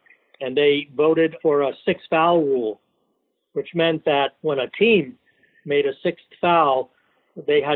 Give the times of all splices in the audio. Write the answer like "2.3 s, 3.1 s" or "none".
1.3 s, 4.4 s

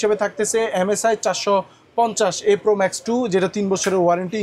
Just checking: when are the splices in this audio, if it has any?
none

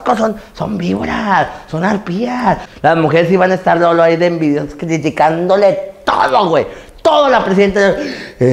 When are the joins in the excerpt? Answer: 2.7 s

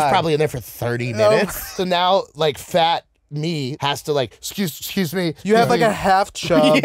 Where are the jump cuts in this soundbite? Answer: 1.7 s, 3.7 s, 5.4 s

